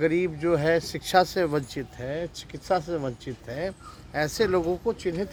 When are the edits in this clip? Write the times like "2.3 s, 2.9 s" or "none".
none